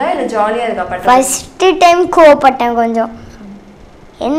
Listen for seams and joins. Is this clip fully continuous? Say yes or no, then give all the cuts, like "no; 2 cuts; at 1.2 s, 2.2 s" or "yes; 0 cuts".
yes; 0 cuts